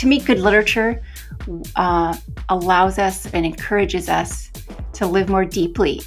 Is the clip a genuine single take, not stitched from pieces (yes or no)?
yes